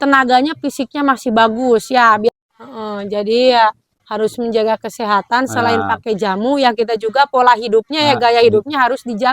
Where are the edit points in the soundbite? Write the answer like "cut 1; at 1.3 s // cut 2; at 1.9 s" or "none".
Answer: cut 1; at 2.3 s